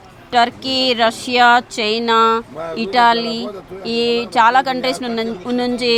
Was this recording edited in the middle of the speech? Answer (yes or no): no